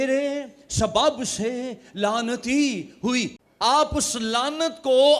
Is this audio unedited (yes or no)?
no